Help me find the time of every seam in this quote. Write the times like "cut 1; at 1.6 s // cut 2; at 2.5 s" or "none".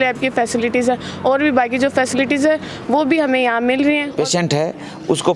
cut 1; at 4.1 s